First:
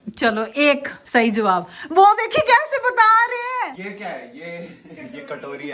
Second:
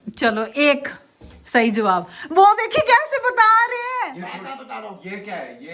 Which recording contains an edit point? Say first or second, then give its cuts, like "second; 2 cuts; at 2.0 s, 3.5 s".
first; 2 cuts; at 0.9 s, 3.7 s